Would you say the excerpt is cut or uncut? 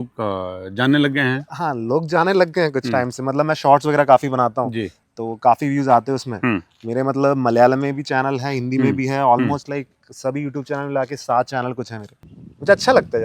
cut